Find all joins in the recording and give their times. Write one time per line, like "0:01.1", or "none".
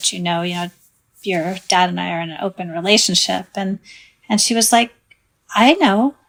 none